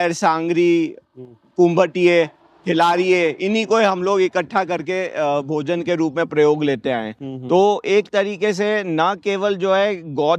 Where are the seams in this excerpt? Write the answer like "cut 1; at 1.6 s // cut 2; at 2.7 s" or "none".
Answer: none